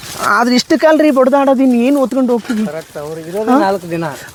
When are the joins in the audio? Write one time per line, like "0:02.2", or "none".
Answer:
none